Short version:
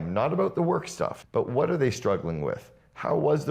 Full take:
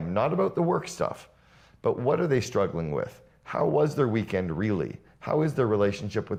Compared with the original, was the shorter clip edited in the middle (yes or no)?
yes